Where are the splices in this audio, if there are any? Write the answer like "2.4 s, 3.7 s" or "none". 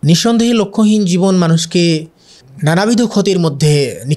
none